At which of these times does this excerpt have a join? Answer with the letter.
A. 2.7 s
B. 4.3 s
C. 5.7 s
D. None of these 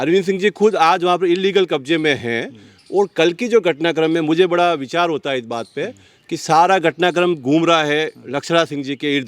D